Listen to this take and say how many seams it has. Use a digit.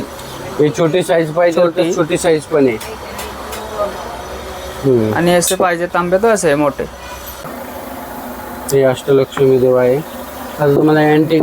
1